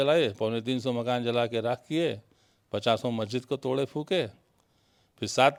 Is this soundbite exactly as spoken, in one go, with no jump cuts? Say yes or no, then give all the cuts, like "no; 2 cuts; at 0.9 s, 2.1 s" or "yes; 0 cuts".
yes; 0 cuts